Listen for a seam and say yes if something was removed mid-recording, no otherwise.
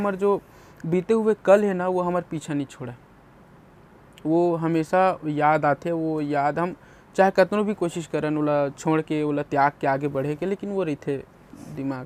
no